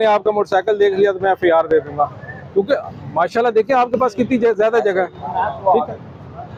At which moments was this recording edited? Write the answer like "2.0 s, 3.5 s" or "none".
none